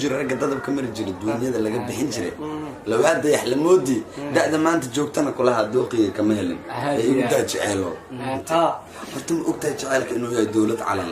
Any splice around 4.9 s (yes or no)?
no